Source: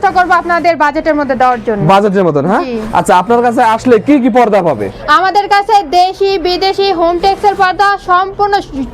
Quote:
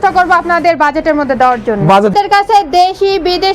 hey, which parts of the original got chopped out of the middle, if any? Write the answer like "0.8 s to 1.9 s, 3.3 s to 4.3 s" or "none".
2.1 s to 5.3 s